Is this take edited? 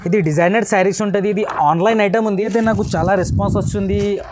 yes; 1 cut; at 2.4 s

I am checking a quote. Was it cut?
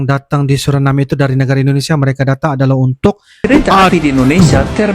yes; 1 cut; at 3.3 s

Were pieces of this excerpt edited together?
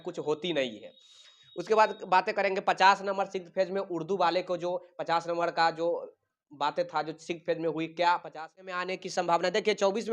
yes; 1 cut; at 8.8 s

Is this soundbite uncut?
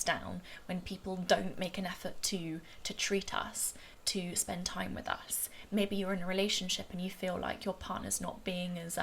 yes; 0 cuts

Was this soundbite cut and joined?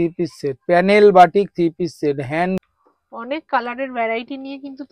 yes; 1 cut; at 2.6 s

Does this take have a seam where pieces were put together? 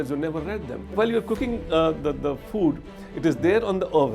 yes; 1 cut; at 0.9 s

